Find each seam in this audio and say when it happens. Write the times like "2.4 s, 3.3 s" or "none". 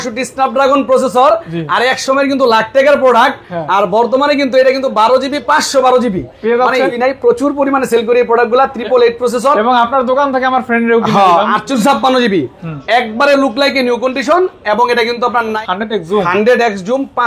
6.9 s, 11.8 s, 15.6 s

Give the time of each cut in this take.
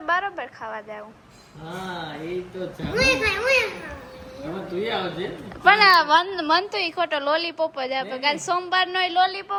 none

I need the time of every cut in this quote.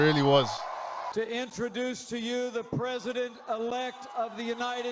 1.1 s

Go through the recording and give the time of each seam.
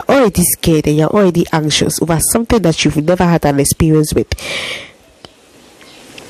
none

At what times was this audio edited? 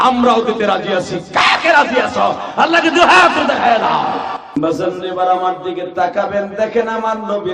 4.4 s

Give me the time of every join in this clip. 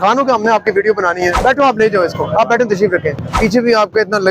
1.4 s, 3.2 s

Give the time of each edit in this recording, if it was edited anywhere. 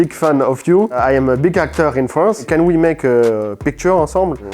2.5 s

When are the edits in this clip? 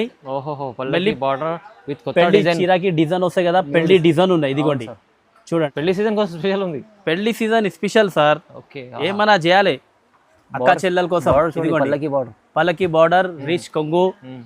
5.7 s

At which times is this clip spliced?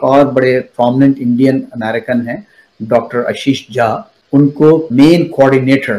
4.9 s

